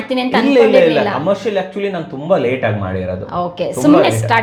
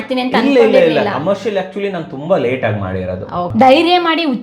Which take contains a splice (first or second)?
second